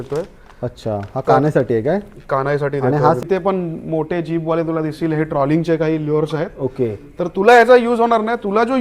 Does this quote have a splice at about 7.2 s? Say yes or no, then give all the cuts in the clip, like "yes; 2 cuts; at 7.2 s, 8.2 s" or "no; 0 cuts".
no; 1 cut; at 3.2 s